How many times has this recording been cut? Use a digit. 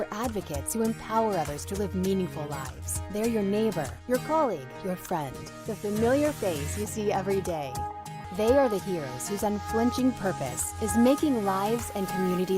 1